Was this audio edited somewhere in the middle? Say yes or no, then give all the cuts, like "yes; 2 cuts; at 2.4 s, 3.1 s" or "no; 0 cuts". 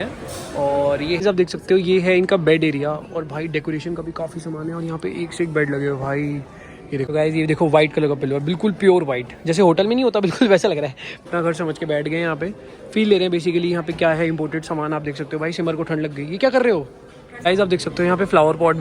yes; 4 cuts; at 1.2 s, 7.1 s, 11.3 s, 17.4 s